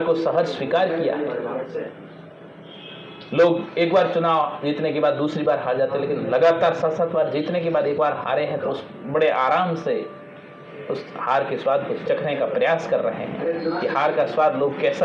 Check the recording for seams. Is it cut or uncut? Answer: uncut